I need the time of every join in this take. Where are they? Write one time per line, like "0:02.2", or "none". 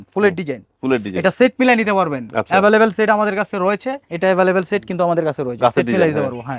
0:04.0